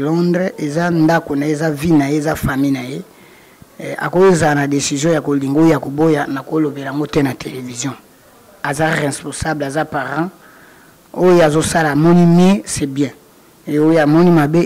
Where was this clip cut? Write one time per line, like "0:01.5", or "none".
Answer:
none